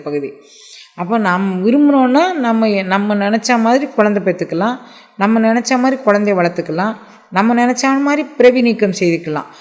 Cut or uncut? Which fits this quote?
uncut